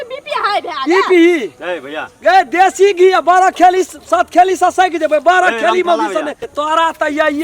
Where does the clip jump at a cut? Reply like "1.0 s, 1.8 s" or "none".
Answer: 6.4 s